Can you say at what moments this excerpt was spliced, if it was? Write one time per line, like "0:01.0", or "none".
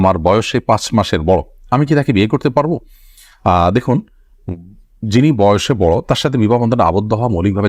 none